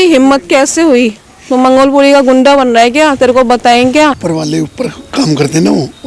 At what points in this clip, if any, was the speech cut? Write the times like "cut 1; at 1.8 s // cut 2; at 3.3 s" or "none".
cut 1; at 4.2 s